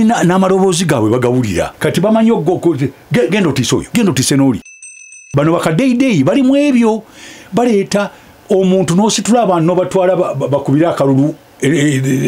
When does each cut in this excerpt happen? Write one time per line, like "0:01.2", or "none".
0:01.7
0:03.9
0:05.1